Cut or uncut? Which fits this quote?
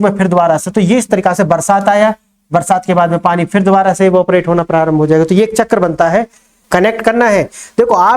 cut